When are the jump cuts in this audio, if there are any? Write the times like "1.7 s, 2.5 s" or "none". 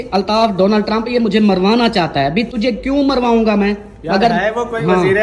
none